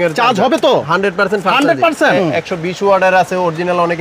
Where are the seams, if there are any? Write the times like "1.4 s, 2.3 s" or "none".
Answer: 2.1 s